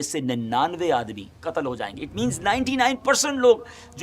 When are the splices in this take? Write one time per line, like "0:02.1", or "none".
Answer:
0:01.4